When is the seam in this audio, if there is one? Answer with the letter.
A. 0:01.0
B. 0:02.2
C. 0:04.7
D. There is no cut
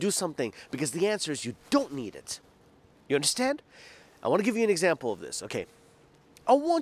D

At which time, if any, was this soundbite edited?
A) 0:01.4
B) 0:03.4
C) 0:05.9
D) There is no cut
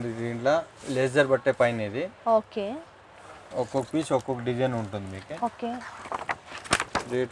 B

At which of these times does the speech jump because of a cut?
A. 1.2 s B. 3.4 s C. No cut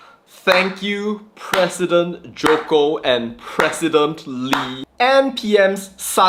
C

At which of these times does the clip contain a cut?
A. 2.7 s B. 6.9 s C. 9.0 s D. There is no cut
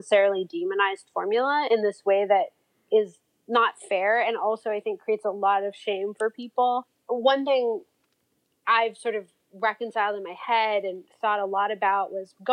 B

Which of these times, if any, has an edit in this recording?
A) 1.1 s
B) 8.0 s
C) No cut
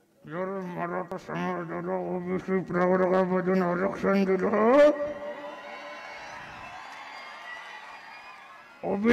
A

